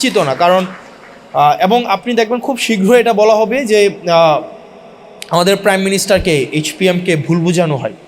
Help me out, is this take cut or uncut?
uncut